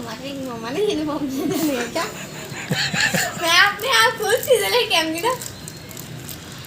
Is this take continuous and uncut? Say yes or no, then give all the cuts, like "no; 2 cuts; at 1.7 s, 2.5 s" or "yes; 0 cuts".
yes; 0 cuts